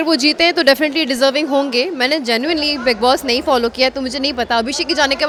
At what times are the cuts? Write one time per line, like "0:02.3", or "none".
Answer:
none